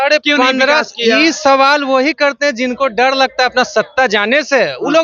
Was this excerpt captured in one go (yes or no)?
yes